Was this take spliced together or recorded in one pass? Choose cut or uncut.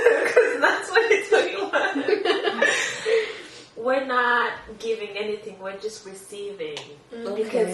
uncut